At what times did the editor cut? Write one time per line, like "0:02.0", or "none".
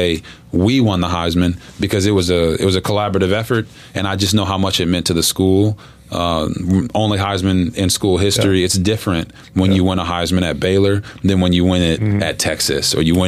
none